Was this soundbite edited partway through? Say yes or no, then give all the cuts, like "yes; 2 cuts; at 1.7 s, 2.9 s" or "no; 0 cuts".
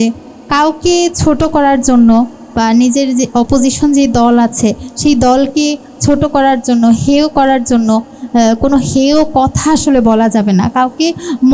no; 0 cuts